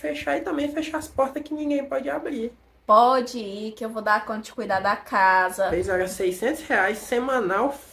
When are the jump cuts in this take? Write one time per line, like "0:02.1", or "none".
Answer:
0:02.7
0:05.8